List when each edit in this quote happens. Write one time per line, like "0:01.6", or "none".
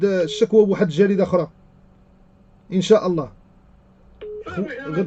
none